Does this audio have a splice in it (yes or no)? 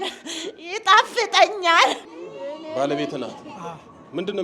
yes